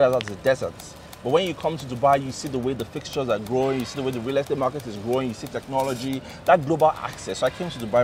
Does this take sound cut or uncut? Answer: uncut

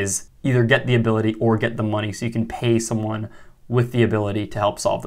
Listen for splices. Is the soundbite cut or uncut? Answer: uncut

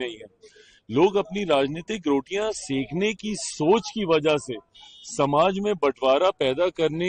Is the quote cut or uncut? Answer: uncut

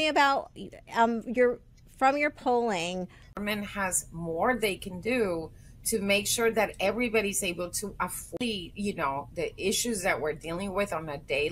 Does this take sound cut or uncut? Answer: uncut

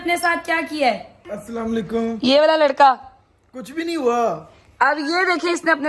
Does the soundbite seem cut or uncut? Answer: cut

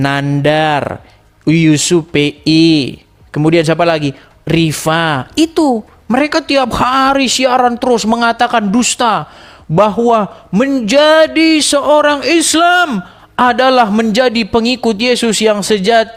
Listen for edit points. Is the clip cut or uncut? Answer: uncut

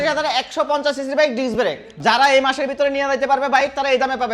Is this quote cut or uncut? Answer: cut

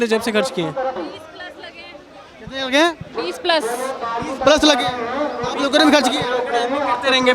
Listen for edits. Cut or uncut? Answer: cut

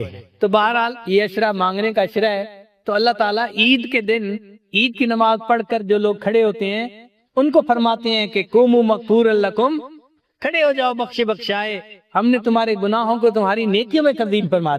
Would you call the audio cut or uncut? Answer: uncut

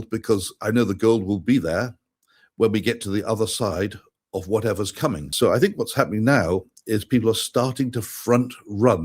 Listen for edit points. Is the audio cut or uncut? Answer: cut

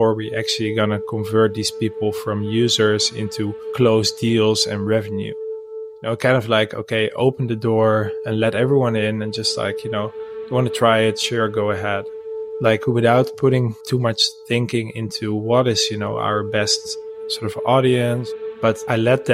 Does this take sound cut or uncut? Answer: cut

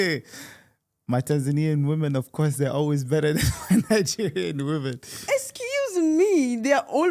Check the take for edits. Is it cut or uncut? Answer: uncut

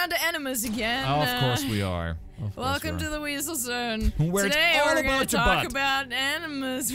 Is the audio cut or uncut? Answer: uncut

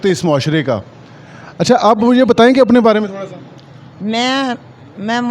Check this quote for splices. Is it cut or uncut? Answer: uncut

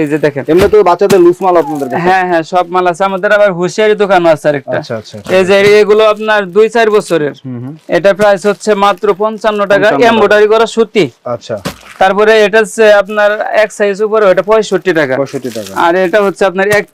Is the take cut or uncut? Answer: uncut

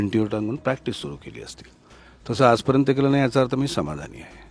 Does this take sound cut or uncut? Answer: uncut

